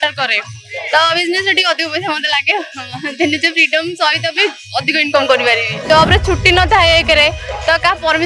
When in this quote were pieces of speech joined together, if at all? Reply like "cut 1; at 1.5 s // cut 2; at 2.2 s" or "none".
cut 1; at 5.7 s